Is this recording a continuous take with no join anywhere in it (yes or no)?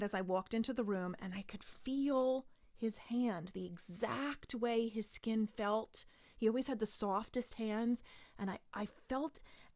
yes